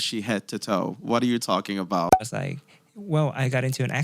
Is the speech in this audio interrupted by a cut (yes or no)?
yes